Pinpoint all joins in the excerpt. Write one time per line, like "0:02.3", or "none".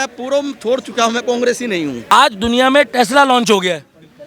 0:02.1